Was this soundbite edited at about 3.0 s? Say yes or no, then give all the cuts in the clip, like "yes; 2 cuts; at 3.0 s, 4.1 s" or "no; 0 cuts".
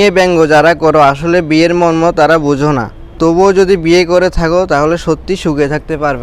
yes; 1 cut; at 3.0 s